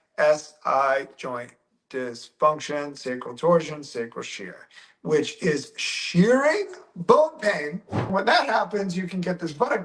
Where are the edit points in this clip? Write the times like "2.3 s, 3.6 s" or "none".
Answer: 8.1 s